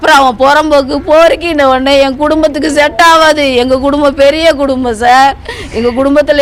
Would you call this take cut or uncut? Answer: uncut